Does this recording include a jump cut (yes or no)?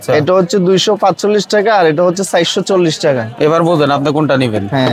no